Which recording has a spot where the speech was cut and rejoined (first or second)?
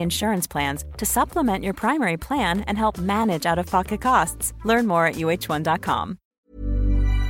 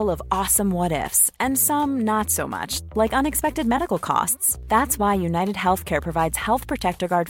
first